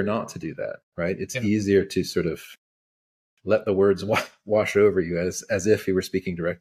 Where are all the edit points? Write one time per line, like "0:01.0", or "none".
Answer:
none